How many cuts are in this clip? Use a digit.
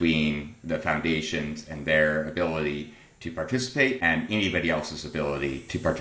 1